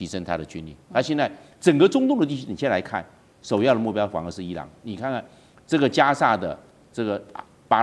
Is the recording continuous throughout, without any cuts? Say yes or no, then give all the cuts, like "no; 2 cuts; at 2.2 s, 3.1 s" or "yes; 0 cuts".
yes; 0 cuts